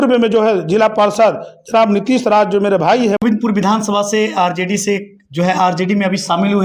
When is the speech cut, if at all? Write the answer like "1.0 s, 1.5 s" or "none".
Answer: 3.2 s